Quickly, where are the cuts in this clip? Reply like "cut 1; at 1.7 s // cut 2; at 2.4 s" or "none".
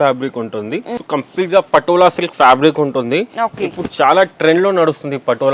cut 1; at 1.0 s